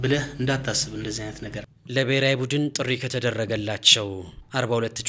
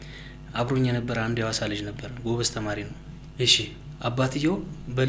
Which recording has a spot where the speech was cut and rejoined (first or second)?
first